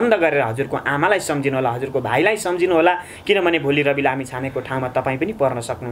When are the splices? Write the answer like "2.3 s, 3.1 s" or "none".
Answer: none

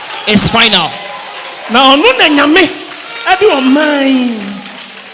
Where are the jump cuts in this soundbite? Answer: none

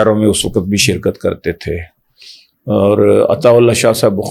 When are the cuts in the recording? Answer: none

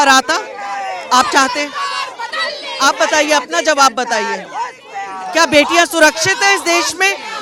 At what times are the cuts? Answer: none

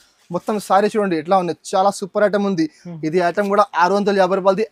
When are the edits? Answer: none

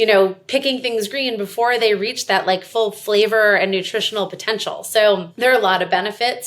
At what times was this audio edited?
5.3 s

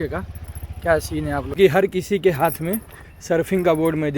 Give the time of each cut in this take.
1.5 s

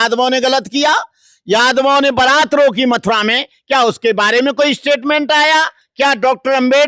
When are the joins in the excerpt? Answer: 5.8 s

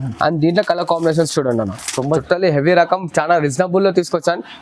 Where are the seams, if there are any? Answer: 2.2 s

